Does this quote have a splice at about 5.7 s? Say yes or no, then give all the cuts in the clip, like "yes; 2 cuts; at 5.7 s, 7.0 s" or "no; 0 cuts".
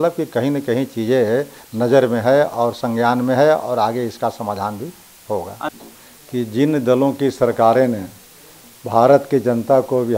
yes; 1 cut; at 5.7 s